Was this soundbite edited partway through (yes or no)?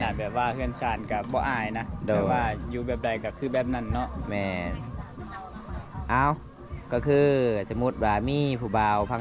no